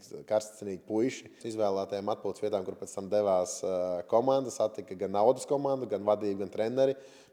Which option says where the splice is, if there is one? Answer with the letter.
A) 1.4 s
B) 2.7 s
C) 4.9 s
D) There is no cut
A